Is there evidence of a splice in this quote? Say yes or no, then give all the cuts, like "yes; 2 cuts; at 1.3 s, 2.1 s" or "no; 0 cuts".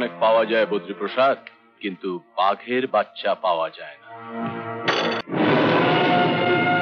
yes; 1 cut; at 5.2 s